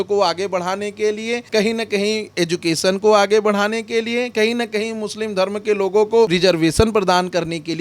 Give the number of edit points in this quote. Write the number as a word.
two